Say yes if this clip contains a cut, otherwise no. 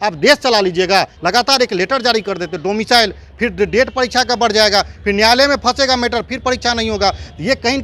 yes